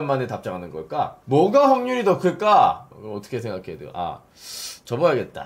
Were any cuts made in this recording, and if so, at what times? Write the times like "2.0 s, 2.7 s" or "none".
2.9 s